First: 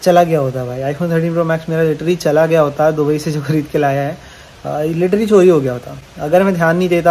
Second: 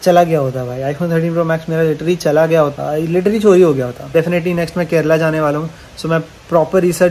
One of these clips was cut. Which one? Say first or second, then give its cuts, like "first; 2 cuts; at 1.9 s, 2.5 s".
second; 2 cuts; at 2.7 s, 4.1 s